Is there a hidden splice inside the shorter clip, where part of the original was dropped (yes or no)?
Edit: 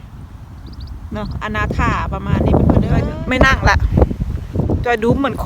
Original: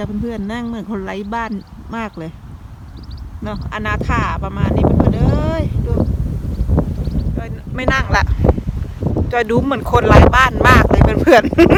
yes